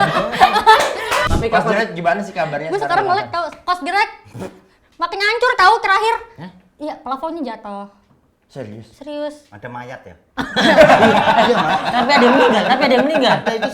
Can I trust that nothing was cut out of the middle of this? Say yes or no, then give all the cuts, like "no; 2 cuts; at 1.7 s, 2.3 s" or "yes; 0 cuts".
no; 1 cut; at 1.2 s